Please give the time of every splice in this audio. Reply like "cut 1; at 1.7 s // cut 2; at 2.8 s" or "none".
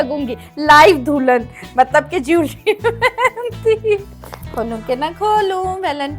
cut 1; at 4.1 s